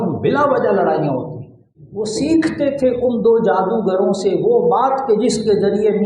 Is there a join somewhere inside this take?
yes; 1 cut; at 1.7 s

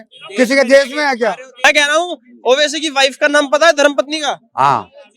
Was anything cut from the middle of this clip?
yes; 1 cut; at 1.5 s

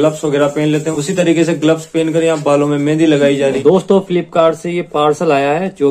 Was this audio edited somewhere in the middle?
yes; 1 cut; at 3.6 s

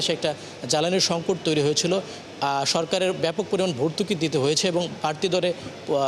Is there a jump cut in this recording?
no; 0 cuts

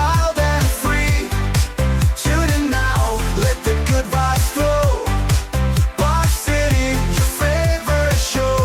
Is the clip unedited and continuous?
yes; 0 cuts

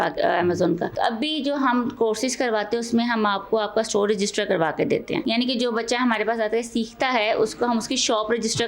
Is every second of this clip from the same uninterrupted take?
no; 2 cuts; at 0.9 s, 5.2 s

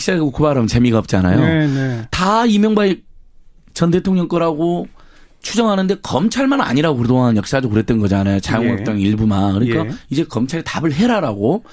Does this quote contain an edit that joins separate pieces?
yes; 1 cut; at 6.0 s

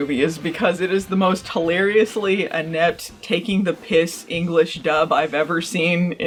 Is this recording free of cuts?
yes; 0 cuts

